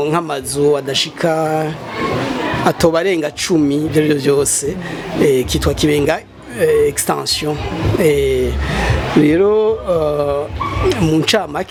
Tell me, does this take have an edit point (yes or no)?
no